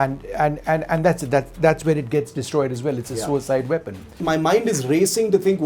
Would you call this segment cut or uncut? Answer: cut